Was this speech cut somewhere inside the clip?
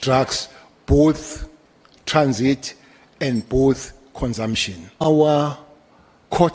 yes; 1 cut; at 5.1 s

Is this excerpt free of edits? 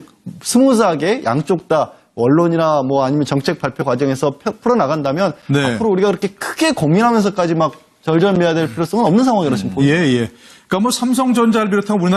no; 1 cut; at 1.4 s

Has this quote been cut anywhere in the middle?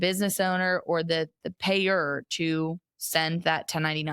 no; 0 cuts

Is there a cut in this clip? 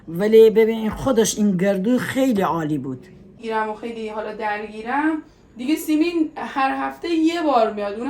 yes; 1 cut; at 3.4 s

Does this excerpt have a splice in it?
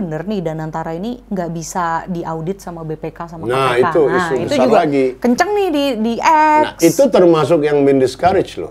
no; 0 cuts

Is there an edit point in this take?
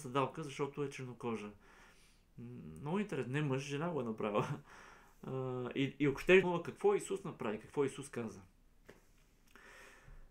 yes; 1 cut; at 6.4 s

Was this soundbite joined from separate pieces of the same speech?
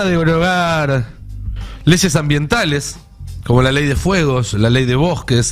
no; 0 cuts

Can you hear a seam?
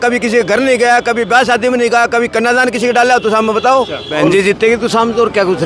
yes; 1 cut; at 4.0 s

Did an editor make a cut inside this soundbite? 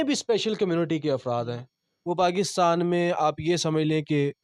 no; 0 cuts

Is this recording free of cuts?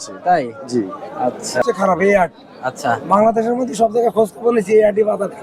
no; 1 cut; at 1.6 s

